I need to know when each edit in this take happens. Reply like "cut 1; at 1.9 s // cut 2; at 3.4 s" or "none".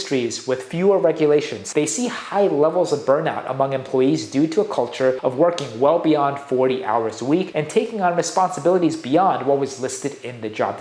cut 1; at 1.6 s // cut 2; at 5.2 s // cut 3; at 7.5 s